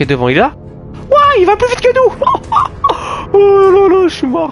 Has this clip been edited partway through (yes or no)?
no